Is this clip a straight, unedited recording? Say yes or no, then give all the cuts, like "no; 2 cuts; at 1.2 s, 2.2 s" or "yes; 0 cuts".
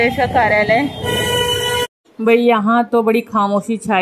yes; 0 cuts